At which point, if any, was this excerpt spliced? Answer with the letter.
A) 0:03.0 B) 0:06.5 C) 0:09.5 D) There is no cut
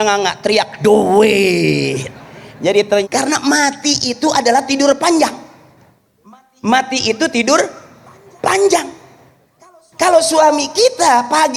A